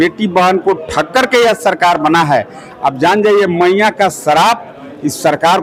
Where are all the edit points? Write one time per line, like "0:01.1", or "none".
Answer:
none

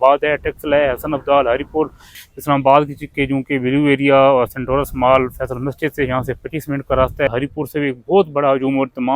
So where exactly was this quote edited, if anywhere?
0:02.2
0:07.3

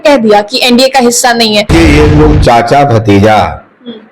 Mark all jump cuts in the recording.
0:01.7

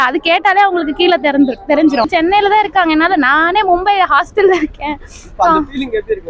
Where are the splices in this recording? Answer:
0:02.1

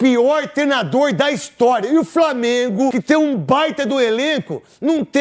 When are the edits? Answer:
0:02.9

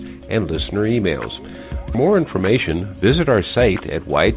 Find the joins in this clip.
0:01.9

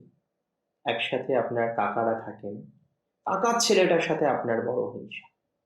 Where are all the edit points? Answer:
none

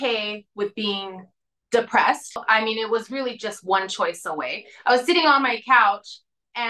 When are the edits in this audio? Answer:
0:02.4

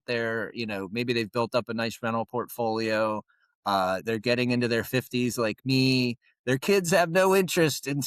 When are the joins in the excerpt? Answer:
none

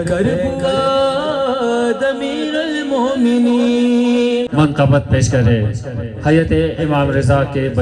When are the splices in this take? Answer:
0:04.5

